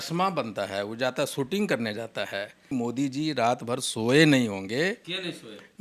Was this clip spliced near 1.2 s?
no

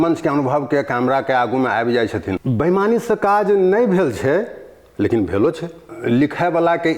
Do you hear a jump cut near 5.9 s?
yes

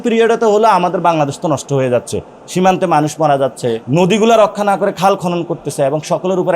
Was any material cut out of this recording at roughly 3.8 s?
yes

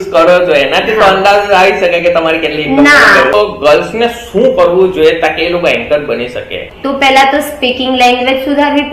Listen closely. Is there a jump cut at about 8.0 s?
no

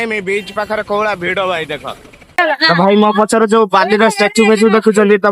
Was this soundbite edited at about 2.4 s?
yes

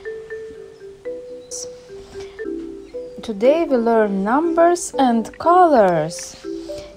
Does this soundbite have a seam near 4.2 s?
no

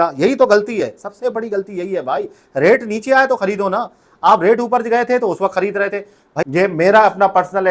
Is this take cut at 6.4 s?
yes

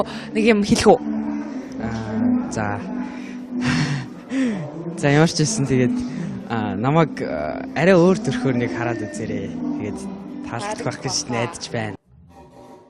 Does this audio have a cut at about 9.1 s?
no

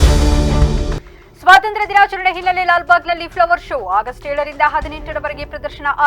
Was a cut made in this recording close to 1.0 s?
yes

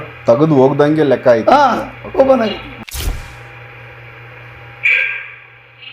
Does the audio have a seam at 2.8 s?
yes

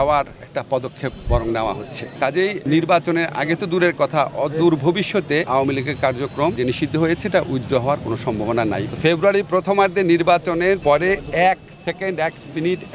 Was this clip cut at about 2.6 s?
yes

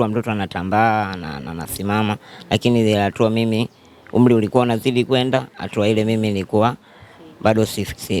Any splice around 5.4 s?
no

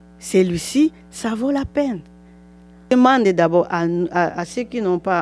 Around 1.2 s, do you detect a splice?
no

